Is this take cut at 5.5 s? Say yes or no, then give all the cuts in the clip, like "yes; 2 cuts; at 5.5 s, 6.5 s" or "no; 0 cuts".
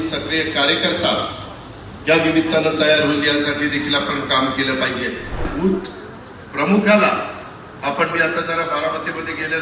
yes; 1 cut; at 5.5 s